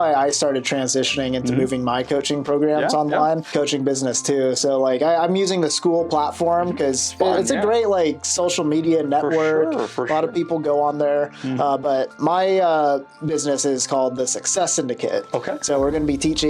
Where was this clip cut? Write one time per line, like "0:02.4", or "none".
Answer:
0:03.5